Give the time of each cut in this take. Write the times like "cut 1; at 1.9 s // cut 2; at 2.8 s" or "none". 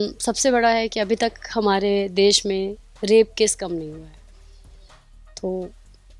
none